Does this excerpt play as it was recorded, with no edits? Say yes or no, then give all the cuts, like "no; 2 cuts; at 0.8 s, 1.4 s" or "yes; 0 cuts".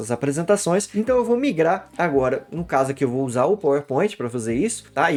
yes; 0 cuts